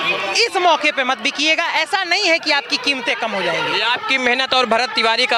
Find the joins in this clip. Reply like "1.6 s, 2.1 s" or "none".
none